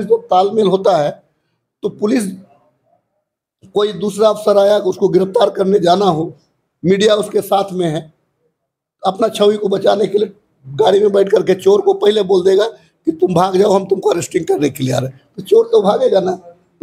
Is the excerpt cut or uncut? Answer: uncut